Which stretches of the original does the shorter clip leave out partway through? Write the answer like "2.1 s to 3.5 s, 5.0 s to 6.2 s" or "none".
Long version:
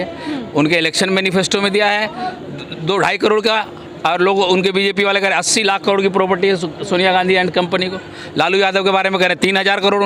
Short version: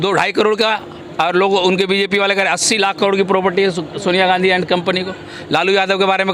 none